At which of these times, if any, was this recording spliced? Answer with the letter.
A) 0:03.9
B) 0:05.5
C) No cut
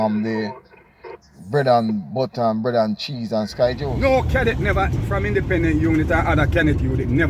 A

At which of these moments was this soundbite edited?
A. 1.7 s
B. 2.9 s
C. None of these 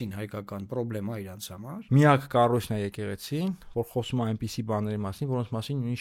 A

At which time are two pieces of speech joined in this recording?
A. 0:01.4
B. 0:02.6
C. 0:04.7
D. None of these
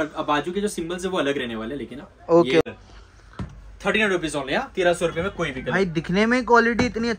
B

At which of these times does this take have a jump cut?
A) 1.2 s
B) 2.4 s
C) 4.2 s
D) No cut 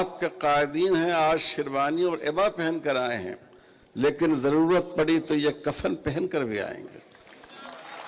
D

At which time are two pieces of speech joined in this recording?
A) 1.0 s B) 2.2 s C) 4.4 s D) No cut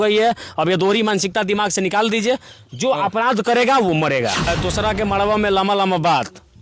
C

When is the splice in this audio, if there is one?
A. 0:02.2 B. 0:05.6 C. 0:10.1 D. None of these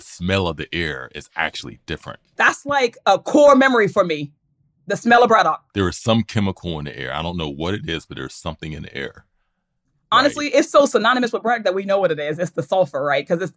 B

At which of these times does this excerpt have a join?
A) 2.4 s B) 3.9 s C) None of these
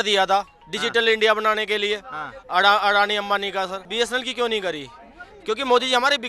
B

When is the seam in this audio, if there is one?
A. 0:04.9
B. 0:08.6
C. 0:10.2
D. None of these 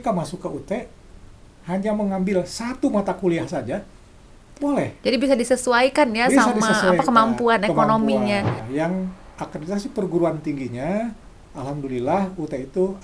B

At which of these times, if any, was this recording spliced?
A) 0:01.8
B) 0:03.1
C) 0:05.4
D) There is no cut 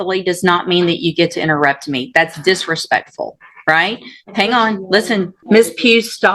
C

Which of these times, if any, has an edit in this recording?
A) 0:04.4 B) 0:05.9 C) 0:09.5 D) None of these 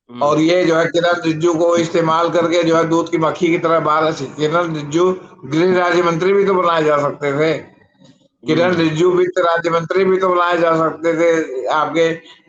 D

